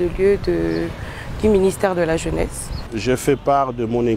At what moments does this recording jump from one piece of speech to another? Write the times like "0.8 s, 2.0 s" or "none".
2.9 s